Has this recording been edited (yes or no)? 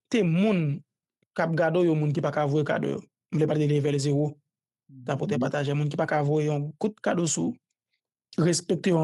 no